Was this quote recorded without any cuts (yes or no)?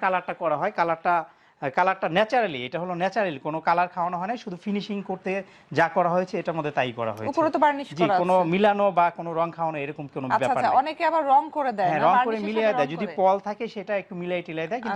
yes